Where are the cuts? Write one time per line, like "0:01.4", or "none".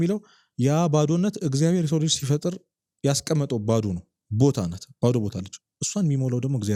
none